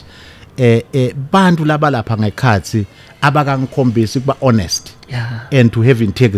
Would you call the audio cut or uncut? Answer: uncut